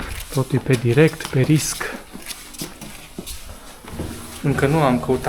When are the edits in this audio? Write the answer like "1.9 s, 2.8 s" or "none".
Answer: 3.9 s

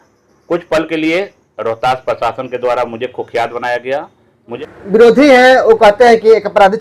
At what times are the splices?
4.6 s

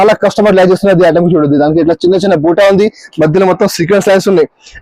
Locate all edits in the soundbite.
none

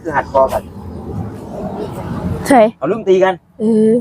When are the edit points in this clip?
1.9 s

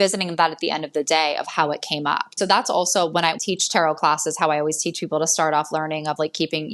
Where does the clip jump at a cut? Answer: 2.3 s, 3.4 s

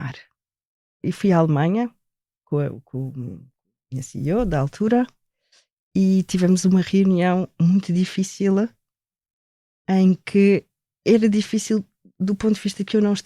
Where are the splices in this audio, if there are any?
0.9 s, 2.4 s

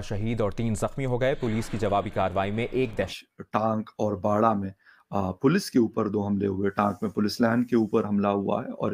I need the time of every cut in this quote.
3.2 s

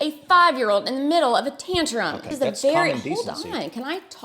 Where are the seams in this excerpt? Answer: 2.3 s

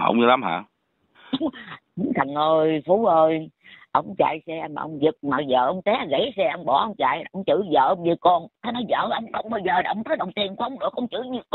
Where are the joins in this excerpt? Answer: none

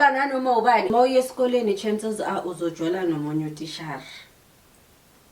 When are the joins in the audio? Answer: 0.9 s

